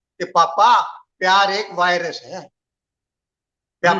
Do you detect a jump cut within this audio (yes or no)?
no